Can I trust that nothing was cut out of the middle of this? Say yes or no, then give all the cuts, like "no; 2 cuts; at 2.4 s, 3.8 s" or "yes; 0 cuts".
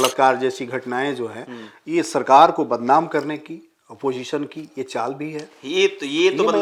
yes; 0 cuts